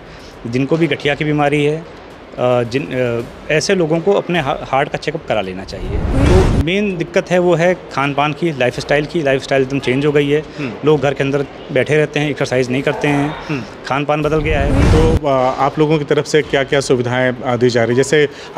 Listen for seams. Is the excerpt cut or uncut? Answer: cut